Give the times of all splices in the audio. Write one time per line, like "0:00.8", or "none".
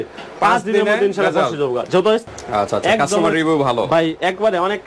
0:02.3